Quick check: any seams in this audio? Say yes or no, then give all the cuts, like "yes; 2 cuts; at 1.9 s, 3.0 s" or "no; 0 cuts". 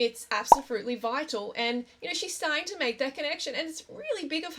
no; 0 cuts